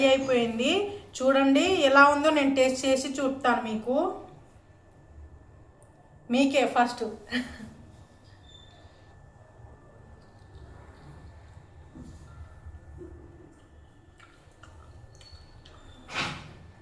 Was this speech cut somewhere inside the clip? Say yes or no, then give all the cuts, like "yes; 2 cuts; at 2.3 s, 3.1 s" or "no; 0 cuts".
no; 0 cuts